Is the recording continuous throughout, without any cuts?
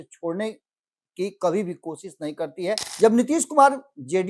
no; 1 cut; at 2.9 s

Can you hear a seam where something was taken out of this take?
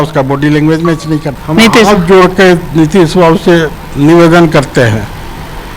yes; 1 cut; at 1.4 s

